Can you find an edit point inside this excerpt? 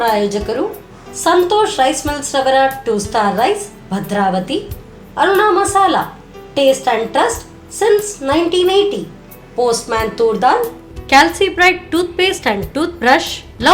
no; 0 cuts

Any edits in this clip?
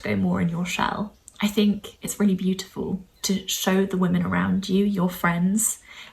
yes; 3 cuts; at 1.2 s, 2.0 s, 3.1 s

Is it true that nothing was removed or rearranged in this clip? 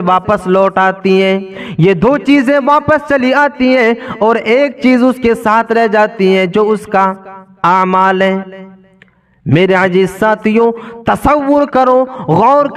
yes; 0 cuts

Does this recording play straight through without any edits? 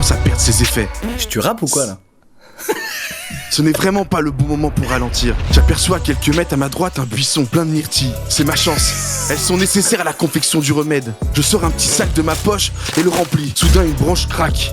yes; 0 cuts

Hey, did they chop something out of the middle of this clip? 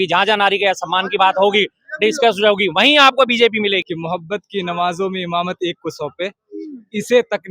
yes; 1 cut; at 3.8 s

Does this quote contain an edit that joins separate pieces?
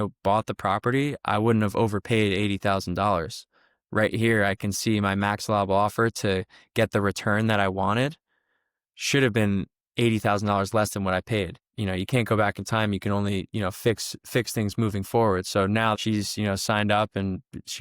yes; 2 cuts; at 11.6 s, 16.0 s

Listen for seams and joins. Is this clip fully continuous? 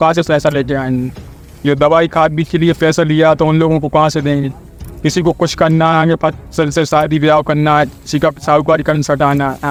yes; 0 cuts

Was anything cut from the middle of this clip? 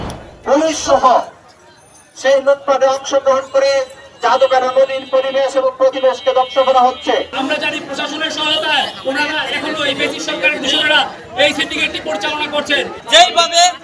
yes; 2 cuts; at 7.3 s, 13.0 s

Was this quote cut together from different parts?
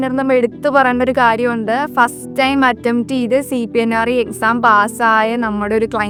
no; 0 cuts

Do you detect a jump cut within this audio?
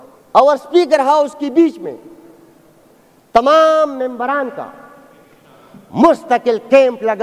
no; 0 cuts

